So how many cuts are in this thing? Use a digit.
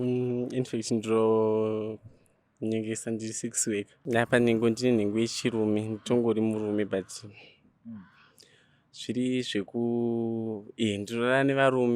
1